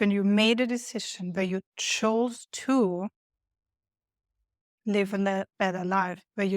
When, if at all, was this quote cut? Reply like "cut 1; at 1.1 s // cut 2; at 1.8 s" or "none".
none